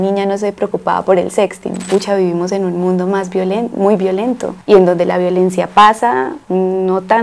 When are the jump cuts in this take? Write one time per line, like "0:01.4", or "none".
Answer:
0:01.8